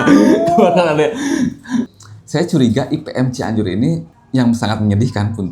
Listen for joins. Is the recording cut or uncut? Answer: cut